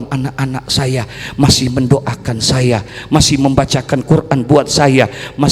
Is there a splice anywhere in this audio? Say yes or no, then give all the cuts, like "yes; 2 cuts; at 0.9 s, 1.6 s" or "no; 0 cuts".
no; 0 cuts